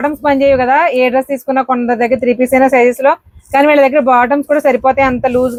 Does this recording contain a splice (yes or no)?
no